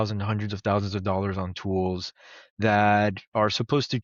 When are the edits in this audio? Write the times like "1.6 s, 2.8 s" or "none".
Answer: none